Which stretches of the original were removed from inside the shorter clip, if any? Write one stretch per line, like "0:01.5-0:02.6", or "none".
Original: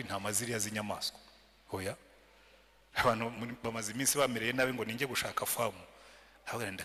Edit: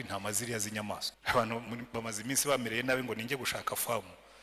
0:01.1-0:02.8